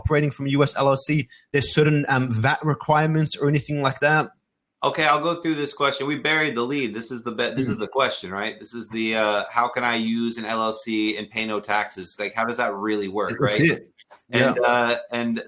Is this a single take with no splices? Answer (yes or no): yes